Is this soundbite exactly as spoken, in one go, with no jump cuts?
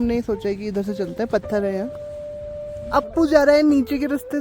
no; 1 cut; at 2.5 s

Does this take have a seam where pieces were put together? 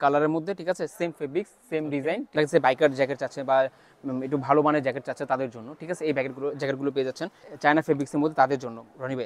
yes; 2 cuts; at 2.4 s, 7.4 s

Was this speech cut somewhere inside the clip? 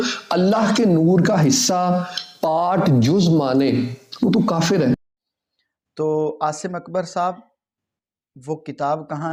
no; 0 cuts

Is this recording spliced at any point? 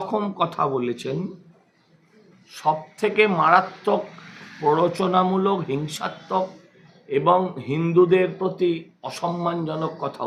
no; 0 cuts

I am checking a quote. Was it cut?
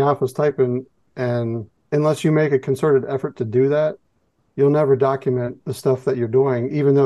yes; 1 cut; at 1.7 s

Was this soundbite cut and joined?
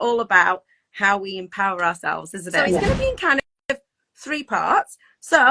yes; 1 cut; at 2.8 s

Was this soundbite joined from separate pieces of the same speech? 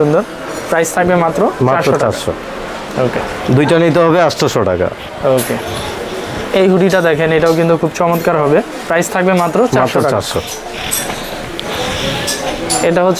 no; 0 cuts

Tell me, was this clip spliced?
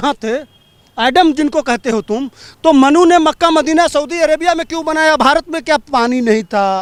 no; 0 cuts

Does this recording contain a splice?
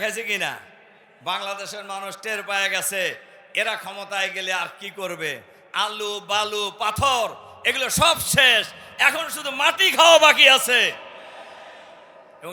no; 0 cuts

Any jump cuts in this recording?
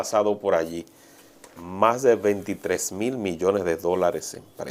no; 0 cuts

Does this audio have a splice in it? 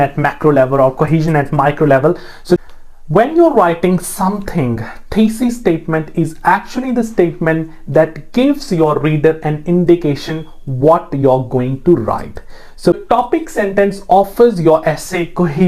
yes; 2 cuts; at 2.6 s, 13.0 s

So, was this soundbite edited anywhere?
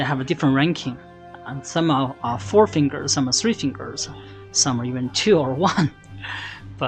no; 0 cuts

